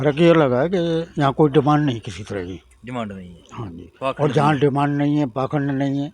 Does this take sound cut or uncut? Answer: uncut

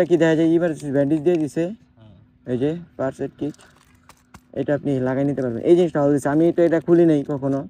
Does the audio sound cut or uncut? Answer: uncut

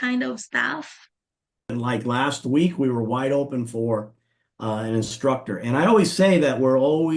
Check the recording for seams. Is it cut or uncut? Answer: cut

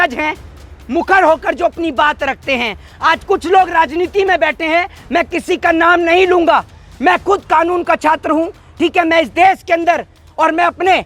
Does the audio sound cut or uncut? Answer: uncut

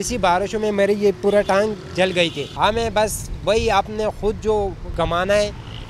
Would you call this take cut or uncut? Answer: cut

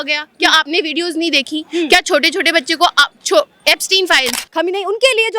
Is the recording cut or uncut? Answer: cut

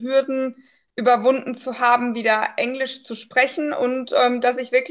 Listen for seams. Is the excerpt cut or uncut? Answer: uncut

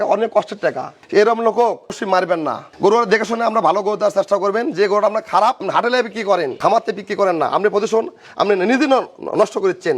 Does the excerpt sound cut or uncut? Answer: cut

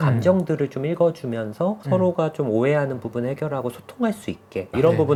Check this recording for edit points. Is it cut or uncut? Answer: uncut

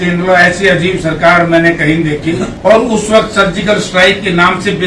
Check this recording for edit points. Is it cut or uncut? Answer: cut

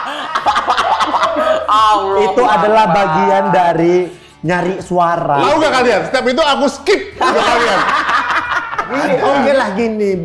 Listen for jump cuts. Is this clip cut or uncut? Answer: cut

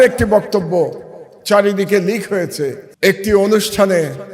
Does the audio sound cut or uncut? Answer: cut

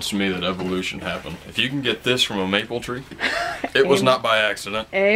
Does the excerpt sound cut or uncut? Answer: uncut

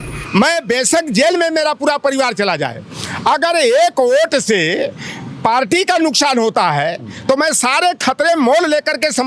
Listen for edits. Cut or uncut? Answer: uncut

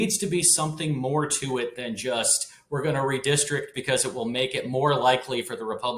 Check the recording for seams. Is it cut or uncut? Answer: uncut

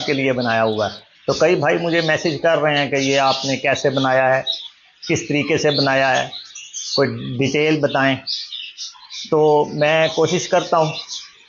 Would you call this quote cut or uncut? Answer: uncut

